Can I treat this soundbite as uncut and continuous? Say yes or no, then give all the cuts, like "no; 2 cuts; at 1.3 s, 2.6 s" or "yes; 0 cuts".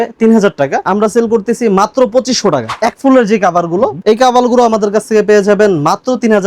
no; 1 cut; at 2.7 s